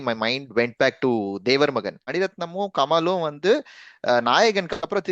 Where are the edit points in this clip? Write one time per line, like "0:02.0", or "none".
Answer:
0:02.0